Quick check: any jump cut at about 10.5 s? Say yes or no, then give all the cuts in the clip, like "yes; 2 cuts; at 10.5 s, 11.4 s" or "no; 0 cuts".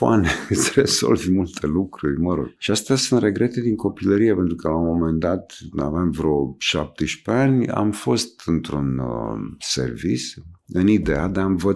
no; 1 cut; at 2.5 s